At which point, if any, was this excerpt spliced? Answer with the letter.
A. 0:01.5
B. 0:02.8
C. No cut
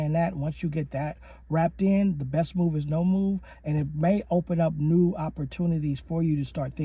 C